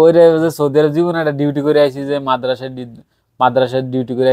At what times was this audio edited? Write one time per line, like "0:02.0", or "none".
none